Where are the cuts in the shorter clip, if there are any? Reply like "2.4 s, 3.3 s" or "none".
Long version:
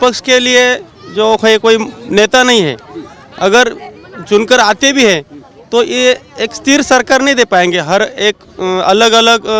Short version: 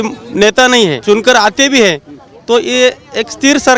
1.0 s

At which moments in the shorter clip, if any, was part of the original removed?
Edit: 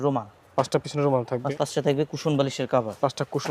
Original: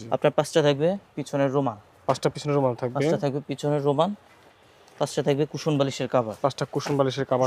1.5 s

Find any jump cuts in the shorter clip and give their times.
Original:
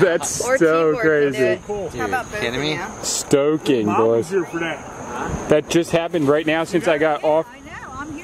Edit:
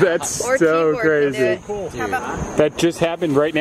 2.2 s

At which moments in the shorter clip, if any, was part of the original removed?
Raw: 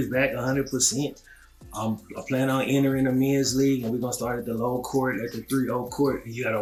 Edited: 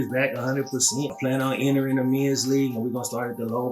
1.1 s

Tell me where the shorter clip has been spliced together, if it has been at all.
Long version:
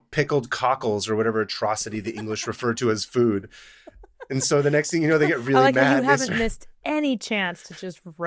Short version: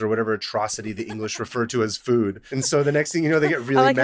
2.4 s

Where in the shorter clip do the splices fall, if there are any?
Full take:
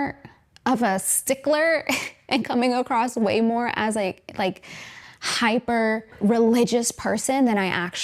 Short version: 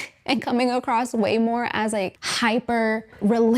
2.2 s

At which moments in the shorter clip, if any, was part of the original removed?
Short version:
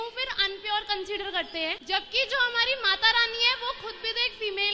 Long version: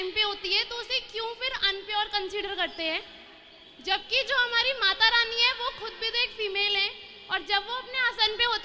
1.8 s

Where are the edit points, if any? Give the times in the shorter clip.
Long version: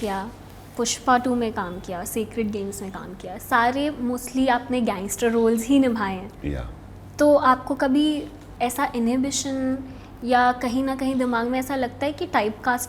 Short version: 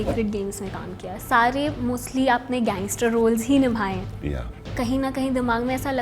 4.7 s

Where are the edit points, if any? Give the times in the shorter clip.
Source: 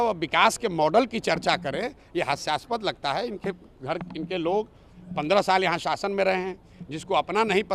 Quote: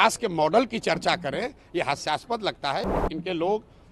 3.0 s

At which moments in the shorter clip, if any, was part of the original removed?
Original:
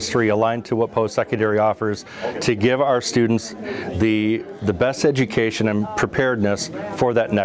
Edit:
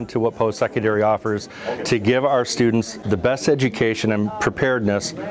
3.0 s

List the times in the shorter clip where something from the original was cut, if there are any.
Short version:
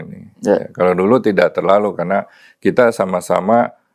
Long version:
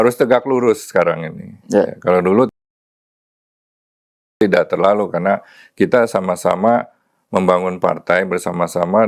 1.2 s

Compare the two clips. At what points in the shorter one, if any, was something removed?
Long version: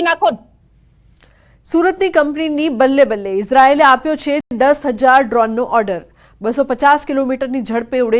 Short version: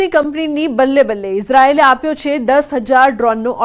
2.4 s

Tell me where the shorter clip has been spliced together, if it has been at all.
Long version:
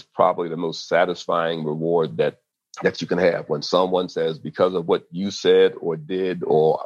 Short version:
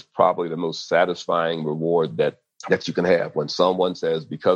2.5 s

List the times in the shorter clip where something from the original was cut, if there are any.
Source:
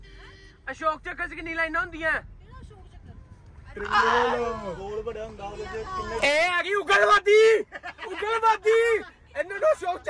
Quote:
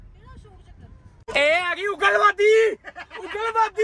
1.3 s

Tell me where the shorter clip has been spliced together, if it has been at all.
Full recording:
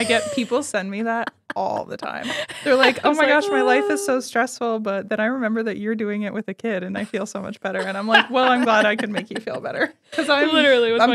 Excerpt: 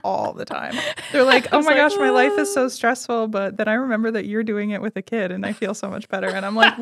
none

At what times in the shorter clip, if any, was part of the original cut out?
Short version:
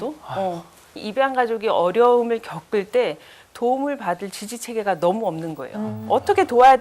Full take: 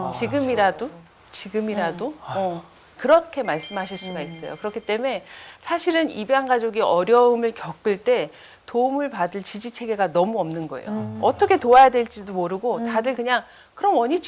1.0 s

